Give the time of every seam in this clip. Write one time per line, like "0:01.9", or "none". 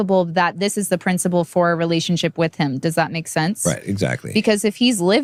none